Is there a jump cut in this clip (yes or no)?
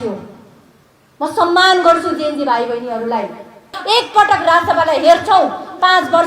yes